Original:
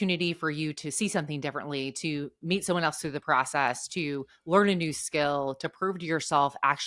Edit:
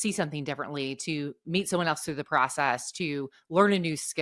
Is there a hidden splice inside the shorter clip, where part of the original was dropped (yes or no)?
no